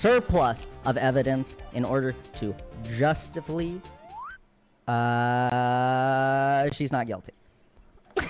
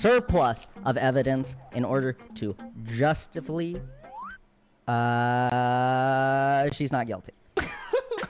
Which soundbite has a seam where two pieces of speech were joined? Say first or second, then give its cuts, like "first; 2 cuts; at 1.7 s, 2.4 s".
second; 1 cut; at 7.3 s